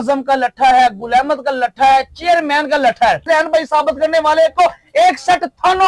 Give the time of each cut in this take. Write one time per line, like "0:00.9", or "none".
0:03.2